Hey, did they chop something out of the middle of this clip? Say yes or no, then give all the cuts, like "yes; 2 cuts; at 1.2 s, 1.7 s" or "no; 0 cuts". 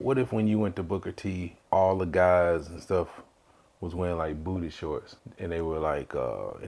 yes; 2 cuts; at 1.5 s, 5.2 s